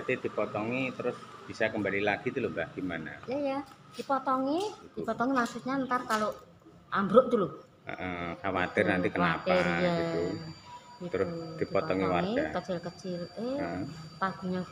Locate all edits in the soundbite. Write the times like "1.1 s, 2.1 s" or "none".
4.9 s